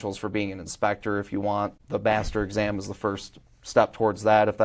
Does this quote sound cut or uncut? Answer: cut